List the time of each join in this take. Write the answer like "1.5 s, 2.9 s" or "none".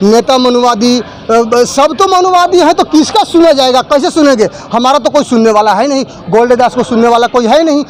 none